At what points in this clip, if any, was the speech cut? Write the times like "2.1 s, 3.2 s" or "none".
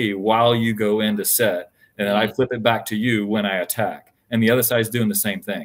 none